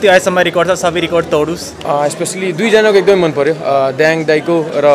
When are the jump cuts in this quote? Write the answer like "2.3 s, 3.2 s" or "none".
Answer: 1.7 s